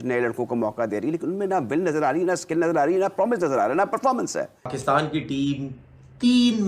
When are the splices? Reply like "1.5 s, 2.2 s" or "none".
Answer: 4.8 s